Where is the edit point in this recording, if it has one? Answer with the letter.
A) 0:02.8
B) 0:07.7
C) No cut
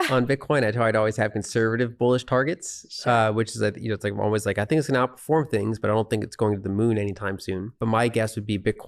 B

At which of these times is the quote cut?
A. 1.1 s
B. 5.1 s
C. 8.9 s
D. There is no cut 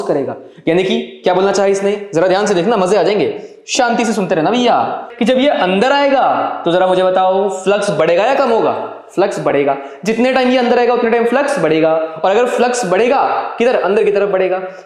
B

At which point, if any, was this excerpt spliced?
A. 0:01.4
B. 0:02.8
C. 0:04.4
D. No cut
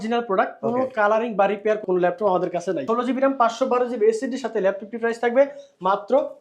B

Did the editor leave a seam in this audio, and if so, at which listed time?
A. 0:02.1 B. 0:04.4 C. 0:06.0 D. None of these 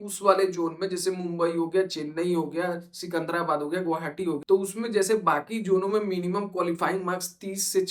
D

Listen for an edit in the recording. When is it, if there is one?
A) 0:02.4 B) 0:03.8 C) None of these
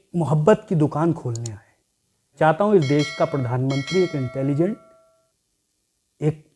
A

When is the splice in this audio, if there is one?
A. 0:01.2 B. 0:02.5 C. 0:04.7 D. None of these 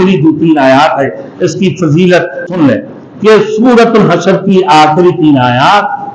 B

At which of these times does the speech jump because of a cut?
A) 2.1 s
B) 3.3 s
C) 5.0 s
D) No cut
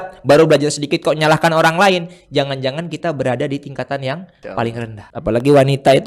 C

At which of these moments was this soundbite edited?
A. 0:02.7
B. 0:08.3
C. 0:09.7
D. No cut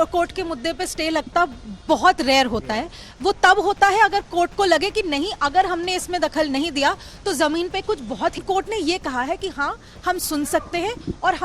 B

